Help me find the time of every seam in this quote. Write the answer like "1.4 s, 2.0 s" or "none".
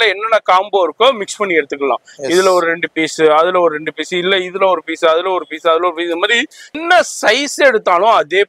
6.8 s